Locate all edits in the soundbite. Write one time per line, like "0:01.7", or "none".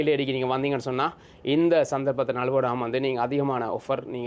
none